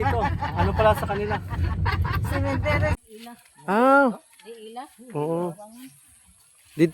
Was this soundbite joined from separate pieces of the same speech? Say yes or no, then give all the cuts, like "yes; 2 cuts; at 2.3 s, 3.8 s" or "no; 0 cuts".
yes; 1 cut; at 3.0 s